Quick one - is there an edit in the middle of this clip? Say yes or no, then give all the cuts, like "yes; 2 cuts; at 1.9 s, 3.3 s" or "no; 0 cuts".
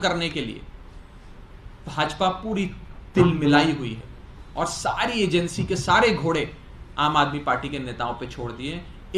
no; 0 cuts